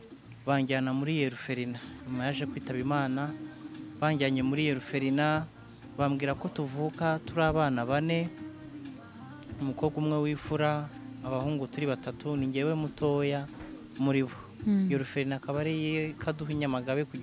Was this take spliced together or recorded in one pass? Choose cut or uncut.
uncut